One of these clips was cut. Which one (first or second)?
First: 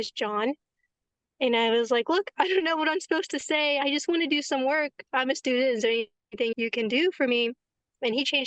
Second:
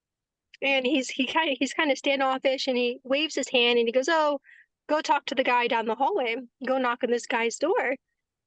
first